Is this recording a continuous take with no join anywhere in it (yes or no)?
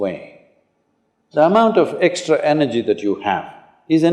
yes